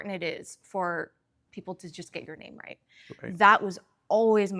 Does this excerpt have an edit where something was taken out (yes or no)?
no